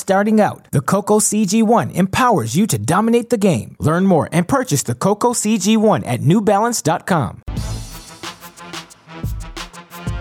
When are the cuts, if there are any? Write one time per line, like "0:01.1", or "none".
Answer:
0:07.4
0:09.2